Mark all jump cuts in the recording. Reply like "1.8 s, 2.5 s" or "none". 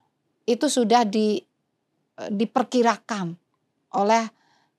none

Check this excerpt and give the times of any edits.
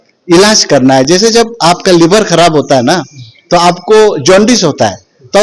none

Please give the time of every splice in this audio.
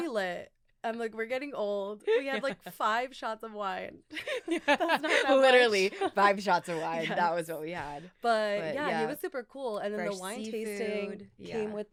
none

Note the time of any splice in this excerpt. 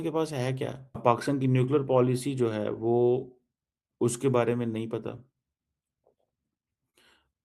1.0 s

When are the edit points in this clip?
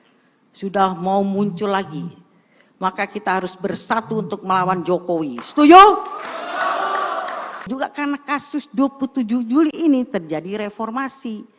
7.7 s

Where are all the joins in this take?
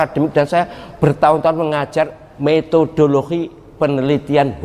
2.2 s, 3.6 s

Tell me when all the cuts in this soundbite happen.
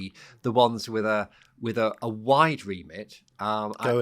none

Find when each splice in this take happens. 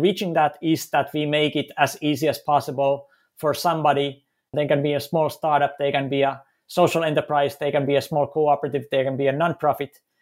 4.5 s

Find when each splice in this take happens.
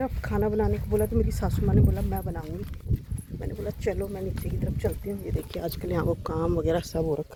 none

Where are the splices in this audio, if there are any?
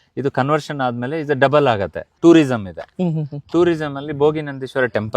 2.1 s

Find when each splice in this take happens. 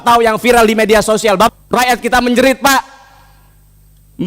1.5 s

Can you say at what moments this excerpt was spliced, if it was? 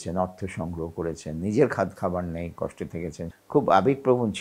3.2 s

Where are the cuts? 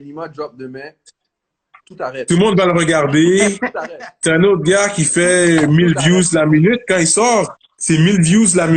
none

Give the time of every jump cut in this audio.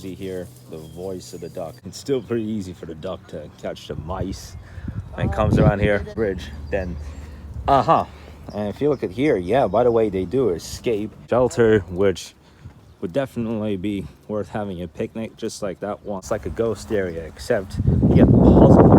1.9 s, 6.1 s, 11.1 s, 16.2 s

